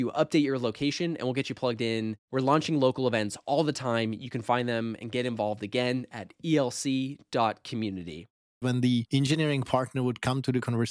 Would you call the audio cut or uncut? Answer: cut